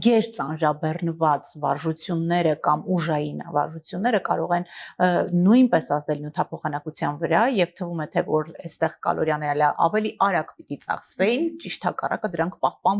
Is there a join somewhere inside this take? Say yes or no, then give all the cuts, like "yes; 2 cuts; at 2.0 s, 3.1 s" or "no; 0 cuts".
no; 0 cuts